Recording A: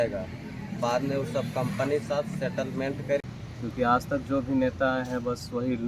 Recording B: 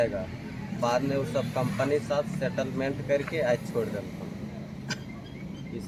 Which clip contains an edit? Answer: A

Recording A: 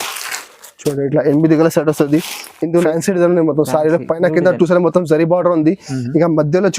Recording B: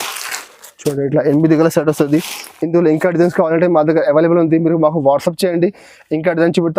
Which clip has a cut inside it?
A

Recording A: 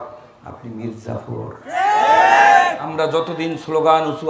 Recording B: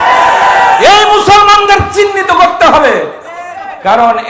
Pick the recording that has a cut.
A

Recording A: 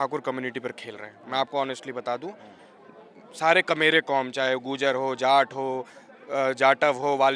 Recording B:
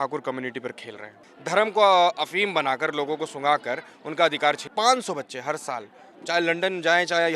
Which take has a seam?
B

